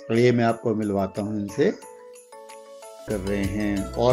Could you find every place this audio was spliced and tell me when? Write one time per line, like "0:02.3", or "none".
0:03.0